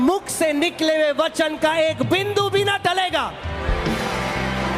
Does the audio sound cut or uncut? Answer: uncut